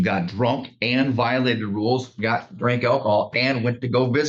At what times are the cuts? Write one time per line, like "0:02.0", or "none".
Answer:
none